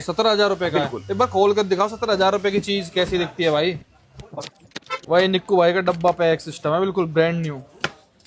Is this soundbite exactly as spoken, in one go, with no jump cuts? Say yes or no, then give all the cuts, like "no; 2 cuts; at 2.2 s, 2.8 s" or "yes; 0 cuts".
yes; 0 cuts